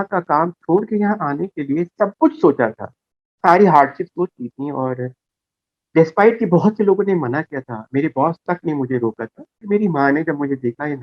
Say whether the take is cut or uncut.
cut